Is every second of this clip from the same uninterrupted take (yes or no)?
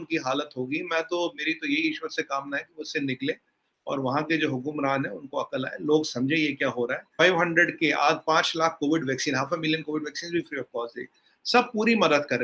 no